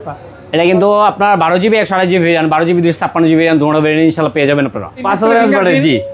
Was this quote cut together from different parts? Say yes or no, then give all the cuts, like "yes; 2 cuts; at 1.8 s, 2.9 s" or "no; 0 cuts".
yes; 1 cut; at 5.1 s